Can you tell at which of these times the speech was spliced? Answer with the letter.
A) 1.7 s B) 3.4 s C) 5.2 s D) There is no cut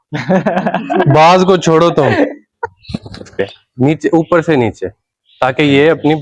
B